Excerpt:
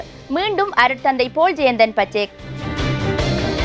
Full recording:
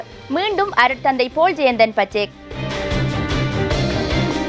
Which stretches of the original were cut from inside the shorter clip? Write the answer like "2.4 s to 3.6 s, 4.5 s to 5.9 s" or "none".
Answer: 2.6 s to 3.1 s